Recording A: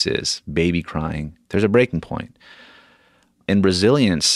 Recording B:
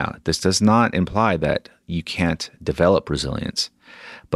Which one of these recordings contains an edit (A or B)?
A